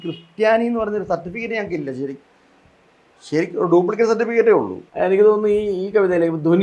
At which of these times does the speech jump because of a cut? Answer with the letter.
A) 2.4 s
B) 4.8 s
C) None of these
B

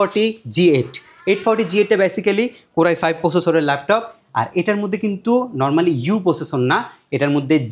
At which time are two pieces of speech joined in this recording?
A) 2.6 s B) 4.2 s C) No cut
C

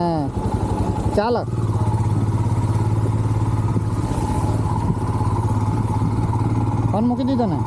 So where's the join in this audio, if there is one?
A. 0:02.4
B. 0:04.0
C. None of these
C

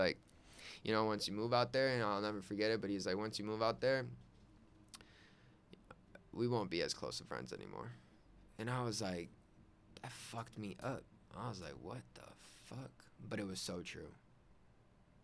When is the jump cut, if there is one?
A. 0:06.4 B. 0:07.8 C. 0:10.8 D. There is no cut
D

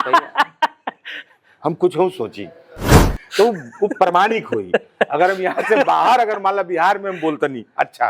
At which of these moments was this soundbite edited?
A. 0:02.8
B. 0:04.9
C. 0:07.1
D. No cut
A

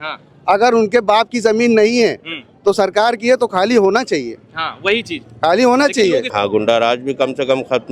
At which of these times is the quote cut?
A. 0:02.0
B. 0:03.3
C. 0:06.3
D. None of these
C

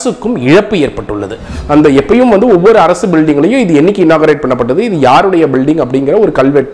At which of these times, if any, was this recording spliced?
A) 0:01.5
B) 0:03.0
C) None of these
A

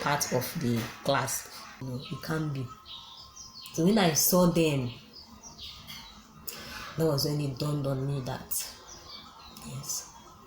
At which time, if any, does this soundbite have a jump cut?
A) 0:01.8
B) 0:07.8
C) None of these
A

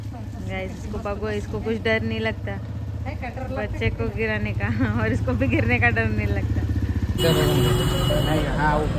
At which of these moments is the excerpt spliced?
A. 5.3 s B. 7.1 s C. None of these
B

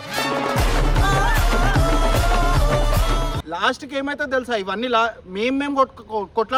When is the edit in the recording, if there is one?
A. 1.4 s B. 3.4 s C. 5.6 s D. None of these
D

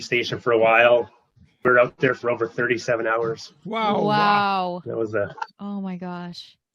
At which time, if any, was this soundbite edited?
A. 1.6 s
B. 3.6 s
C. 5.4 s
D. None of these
A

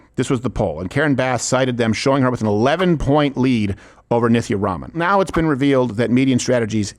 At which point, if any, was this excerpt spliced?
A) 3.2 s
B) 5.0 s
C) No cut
B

